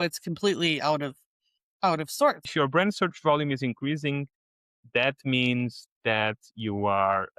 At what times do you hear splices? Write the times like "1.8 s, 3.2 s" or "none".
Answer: 2.4 s